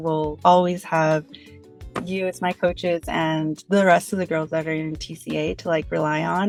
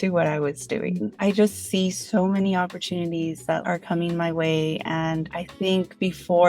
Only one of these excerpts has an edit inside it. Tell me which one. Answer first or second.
second